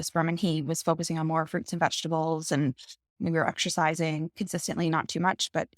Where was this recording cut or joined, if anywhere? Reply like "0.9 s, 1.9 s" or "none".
3.2 s, 4.3 s